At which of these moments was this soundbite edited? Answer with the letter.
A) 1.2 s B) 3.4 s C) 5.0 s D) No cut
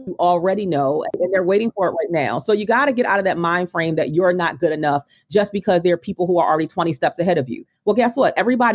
A